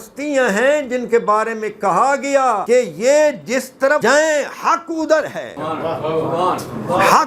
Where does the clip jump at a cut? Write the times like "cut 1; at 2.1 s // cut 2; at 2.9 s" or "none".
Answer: cut 1; at 2.6 s // cut 2; at 4.0 s // cut 3; at 5.5 s